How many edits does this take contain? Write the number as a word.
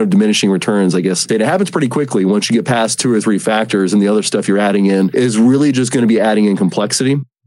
one